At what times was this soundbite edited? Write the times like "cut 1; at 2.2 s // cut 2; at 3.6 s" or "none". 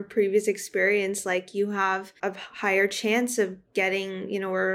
cut 1; at 2.1 s